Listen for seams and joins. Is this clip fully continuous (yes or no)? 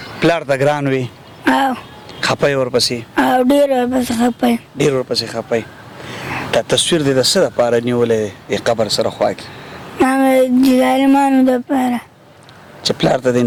yes